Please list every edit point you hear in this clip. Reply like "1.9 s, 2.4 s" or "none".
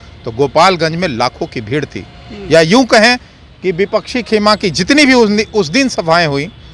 none